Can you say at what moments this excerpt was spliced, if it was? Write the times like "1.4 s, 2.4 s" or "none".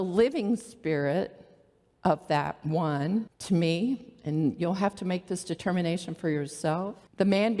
3.4 s